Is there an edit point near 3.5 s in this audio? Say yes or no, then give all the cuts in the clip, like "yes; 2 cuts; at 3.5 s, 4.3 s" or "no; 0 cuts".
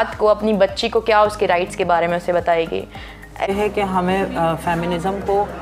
yes; 1 cut; at 3.5 s